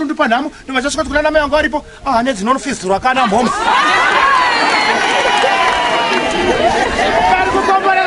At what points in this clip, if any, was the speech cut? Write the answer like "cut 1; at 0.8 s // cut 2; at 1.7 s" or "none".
none